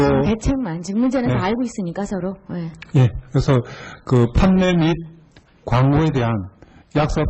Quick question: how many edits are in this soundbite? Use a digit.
1